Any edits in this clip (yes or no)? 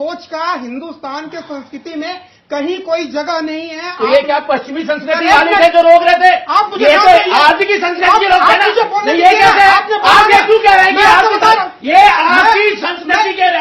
no